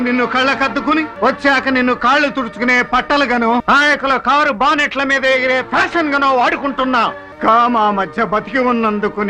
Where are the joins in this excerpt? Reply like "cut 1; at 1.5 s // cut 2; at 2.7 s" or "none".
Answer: cut 1; at 1.1 s // cut 2; at 3.6 s // cut 3; at 7.3 s